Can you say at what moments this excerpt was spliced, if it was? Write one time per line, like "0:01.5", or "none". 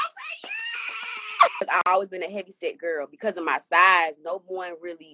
0:01.6

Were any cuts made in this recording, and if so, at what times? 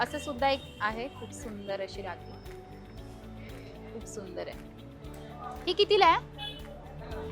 0:06.2

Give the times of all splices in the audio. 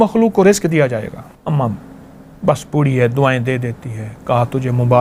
0:01.3

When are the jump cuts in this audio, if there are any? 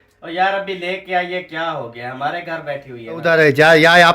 0:03.2

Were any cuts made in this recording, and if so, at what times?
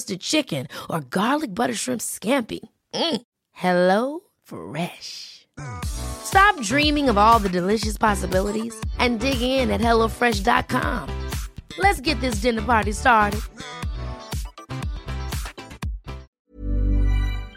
0:16.3

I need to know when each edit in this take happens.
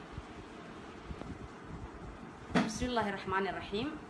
0:01.2

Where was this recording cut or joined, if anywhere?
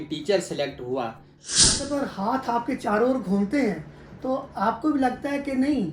0:01.7

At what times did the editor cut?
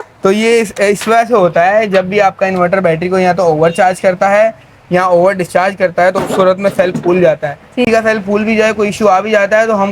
0:07.9

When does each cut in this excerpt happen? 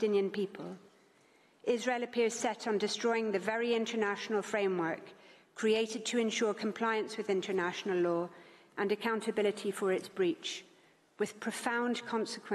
none

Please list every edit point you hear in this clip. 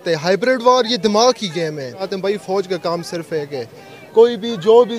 0:02.1

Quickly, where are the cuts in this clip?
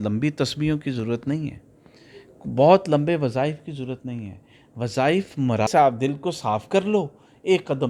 0:05.7

